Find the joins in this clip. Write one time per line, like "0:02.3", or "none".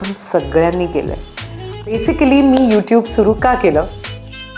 0:01.7